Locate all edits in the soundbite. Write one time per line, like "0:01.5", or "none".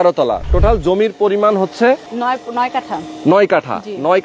0:02.1